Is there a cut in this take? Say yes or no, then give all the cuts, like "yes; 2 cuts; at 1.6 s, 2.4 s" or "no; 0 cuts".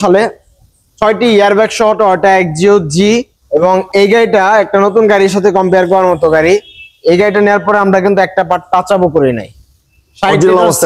yes; 1 cut; at 3.3 s